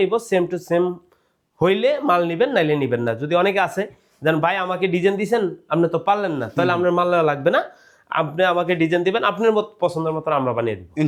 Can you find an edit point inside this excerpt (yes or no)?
no